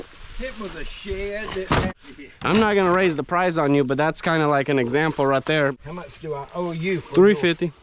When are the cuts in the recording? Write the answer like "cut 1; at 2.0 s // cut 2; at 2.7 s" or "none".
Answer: cut 1; at 2.0 s // cut 2; at 5.8 s

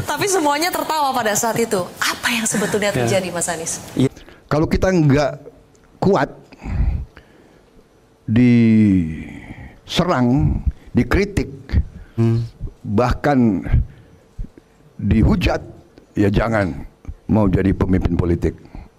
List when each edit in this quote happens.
cut 1; at 4.1 s

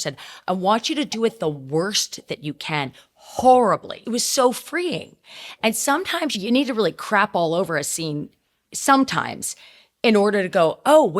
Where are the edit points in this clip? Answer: cut 1; at 3.9 s // cut 2; at 6.3 s

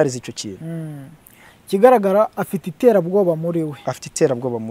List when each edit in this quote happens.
none

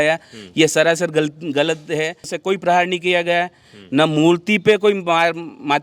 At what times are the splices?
cut 1; at 2.3 s

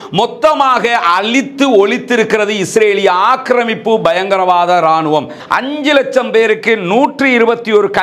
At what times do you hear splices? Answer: cut 1; at 5.4 s

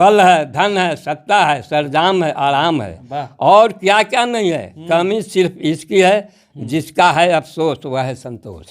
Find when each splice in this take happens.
none

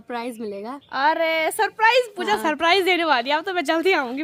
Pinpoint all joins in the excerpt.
none

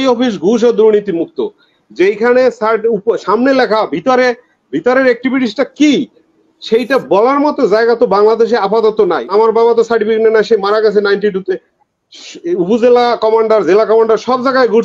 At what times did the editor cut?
cut 1; at 9.3 s

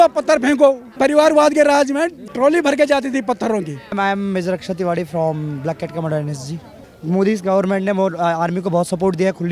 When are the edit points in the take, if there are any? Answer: cut 1; at 0.9 s // cut 2; at 2.3 s // cut 3; at 4.0 s // cut 4; at 6.9 s

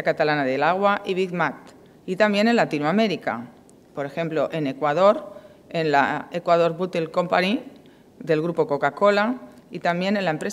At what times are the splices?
cut 1; at 4.1 s

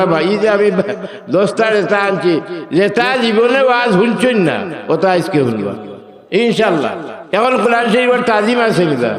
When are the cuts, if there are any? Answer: cut 1; at 7.1 s

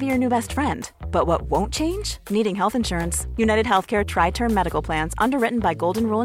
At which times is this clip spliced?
none

